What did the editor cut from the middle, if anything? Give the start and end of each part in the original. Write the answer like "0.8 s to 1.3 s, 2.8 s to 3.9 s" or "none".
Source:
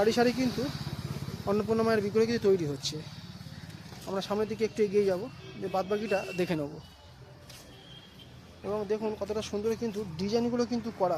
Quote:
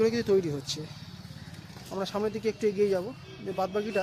none